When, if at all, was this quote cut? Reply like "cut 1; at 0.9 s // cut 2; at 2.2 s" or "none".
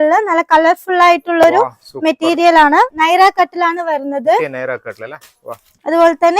cut 1; at 2.9 s